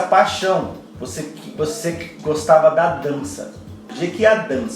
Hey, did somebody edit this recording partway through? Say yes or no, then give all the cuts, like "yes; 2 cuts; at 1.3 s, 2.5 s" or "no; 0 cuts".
yes; 1 cut; at 3.8 s